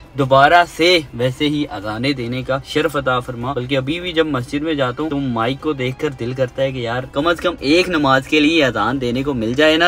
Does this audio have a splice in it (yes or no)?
no